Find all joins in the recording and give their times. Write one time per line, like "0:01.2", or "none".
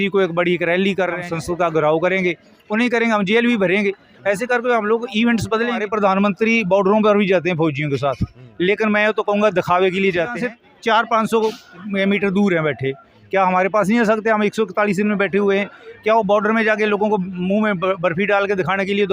0:01.2
0:05.9
0:10.4